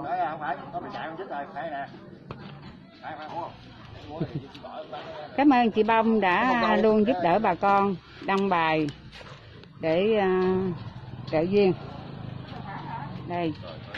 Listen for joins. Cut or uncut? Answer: uncut